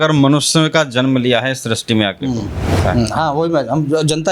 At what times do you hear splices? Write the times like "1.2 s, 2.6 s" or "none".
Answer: 2.8 s